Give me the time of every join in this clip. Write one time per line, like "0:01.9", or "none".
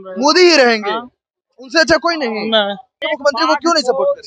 0:03.1